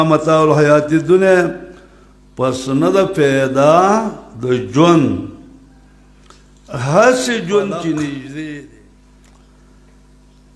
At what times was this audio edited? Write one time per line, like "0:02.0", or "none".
0:08.6